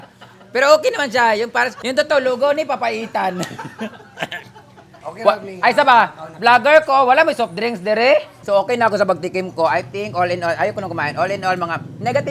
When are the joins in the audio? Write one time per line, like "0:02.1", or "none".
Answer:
0:01.8
0:04.9
0:08.3